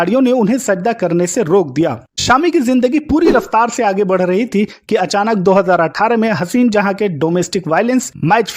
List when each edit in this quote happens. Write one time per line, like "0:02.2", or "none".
0:02.1